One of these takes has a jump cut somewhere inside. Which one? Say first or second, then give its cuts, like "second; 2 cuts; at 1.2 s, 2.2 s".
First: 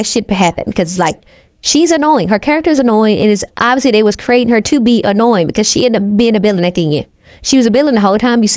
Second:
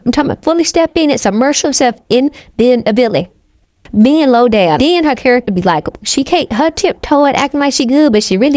second; 2 cuts; at 3.8 s, 4.8 s